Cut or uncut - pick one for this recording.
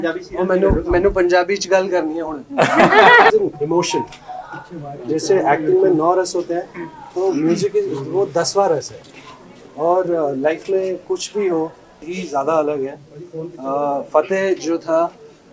cut